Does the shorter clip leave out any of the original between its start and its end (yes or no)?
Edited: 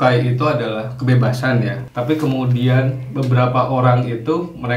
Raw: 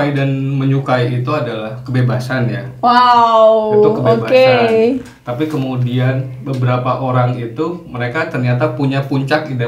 yes